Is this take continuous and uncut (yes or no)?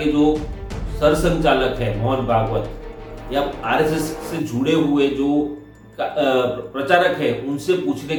yes